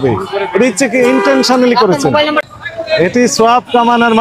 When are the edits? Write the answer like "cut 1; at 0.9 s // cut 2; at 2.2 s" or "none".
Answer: cut 1; at 2.5 s